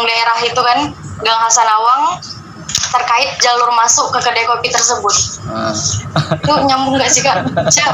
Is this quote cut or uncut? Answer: uncut